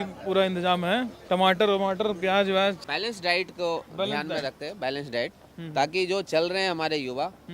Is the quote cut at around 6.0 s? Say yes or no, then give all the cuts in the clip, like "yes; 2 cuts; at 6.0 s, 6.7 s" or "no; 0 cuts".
no; 2 cuts; at 1.1 s, 2.8 s